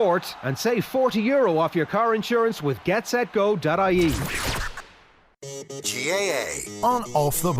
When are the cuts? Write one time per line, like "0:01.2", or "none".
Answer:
0:05.4